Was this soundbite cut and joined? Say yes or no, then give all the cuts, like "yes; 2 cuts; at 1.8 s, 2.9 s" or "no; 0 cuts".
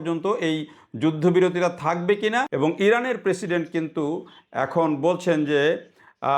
yes; 1 cut; at 2.5 s